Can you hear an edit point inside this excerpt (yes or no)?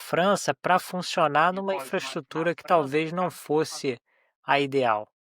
no